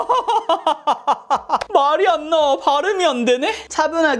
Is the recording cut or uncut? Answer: uncut